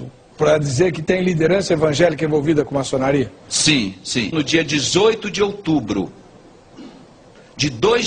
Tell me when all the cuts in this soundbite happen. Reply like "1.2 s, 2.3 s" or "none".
none